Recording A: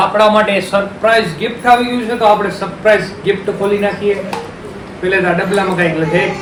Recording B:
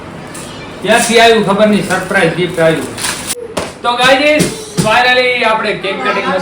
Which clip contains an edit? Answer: B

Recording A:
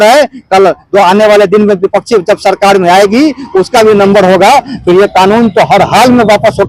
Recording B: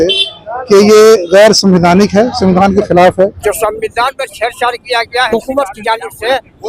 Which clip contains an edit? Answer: B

